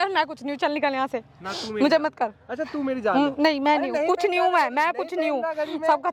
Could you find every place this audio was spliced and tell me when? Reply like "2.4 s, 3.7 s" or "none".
none